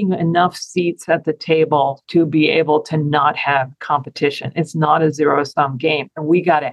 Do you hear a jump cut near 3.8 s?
no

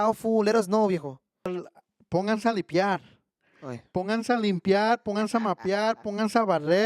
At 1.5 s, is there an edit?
yes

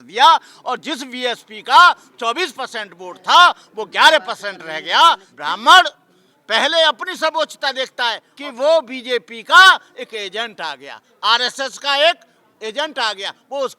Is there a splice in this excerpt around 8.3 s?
yes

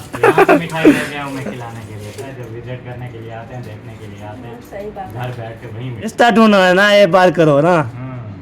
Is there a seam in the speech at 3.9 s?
no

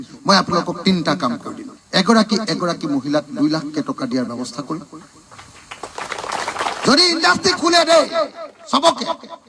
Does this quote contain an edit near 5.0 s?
no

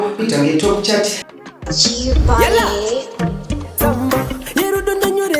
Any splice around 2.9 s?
no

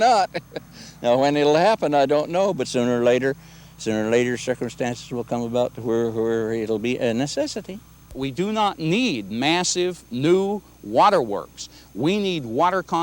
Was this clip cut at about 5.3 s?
no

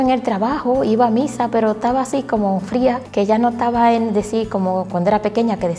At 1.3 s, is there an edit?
no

